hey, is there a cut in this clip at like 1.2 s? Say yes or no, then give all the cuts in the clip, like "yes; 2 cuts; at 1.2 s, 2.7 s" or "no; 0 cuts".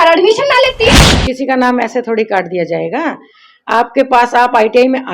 yes; 1 cut; at 1.2 s